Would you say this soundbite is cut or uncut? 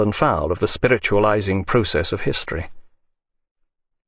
cut